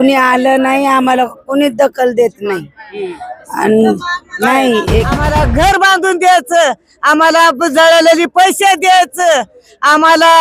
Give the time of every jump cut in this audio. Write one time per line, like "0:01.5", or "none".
0:05.2